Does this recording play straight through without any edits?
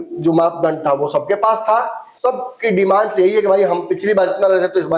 yes; 0 cuts

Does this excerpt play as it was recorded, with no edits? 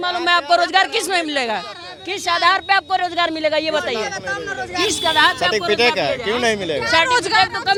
yes; 0 cuts

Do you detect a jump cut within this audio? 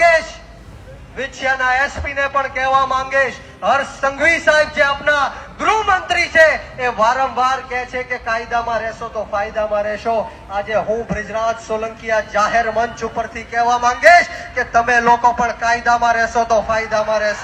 no; 0 cuts

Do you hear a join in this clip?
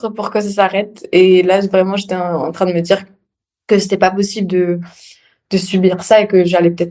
no; 0 cuts

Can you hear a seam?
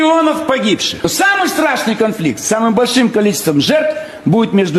no; 0 cuts

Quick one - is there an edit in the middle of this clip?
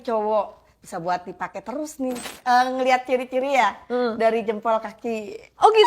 yes; 1 cut; at 2.3 s

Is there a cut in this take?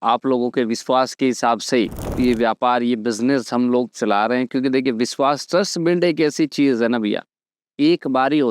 no; 0 cuts

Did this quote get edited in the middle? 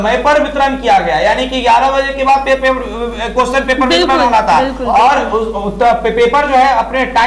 no; 0 cuts

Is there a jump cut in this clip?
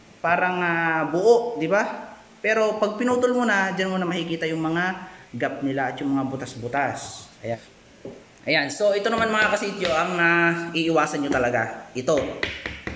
yes; 1 cut; at 7.7 s

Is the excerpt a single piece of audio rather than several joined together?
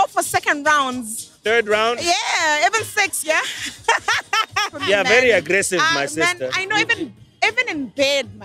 no; 1 cut; at 4.7 s

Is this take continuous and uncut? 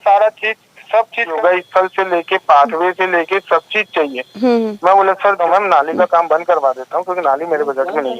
no; 2 cuts; at 1.4 s, 5.4 s

